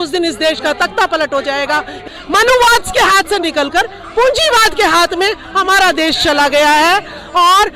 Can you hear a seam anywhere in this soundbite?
yes; 1 cut; at 2.1 s

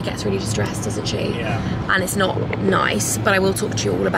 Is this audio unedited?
yes; 0 cuts

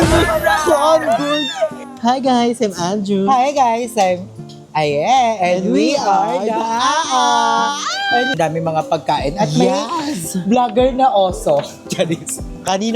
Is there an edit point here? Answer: yes; 2 cuts; at 1.9 s, 8.3 s

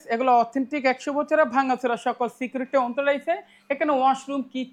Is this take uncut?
yes; 0 cuts

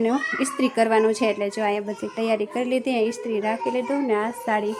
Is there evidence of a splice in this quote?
no; 0 cuts

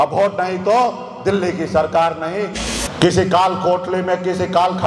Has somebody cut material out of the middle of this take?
yes; 1 cut; at 2.6 s

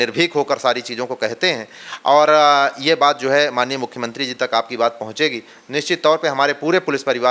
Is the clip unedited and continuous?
yes; 0 cuts

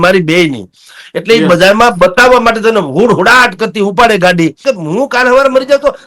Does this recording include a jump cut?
yes; 1 cut; at 4.6 s

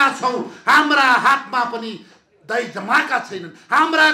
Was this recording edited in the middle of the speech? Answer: no; 0 cuts

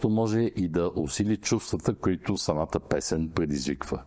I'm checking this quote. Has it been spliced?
no; 0 cuts

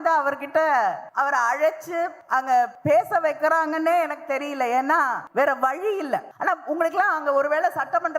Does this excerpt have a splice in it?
yes; 4 cuts; at 1.0 s, 2.5 s, 5.2 s, 6.3 s

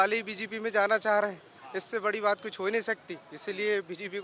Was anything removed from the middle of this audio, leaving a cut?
no; 0 cuts

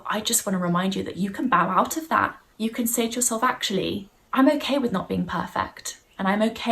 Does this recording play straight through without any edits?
no; 2 cuts; at 2.4 s, 4.2 s

